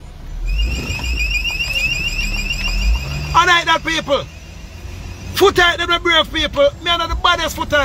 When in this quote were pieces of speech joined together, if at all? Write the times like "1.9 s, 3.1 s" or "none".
none